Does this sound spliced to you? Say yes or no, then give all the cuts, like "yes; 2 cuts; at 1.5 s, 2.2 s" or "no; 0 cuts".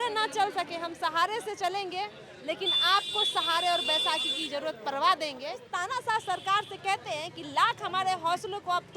yes; 1 cut; at 5.6 s